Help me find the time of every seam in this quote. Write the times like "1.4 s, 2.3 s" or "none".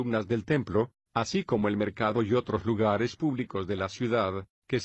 2.8 s